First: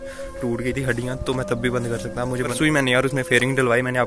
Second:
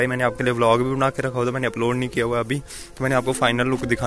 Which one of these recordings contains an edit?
first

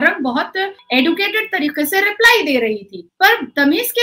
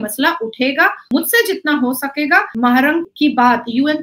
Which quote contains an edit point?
second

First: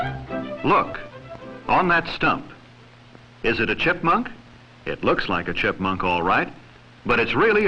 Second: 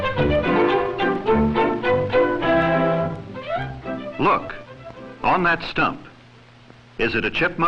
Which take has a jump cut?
first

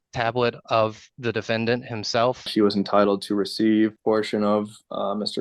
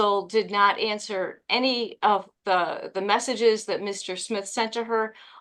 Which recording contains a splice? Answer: first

